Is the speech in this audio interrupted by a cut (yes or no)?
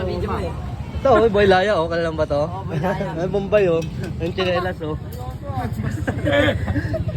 no